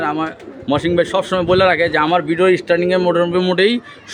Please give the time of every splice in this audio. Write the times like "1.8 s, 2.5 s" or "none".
none